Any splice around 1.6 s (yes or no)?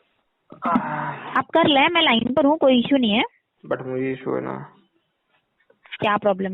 no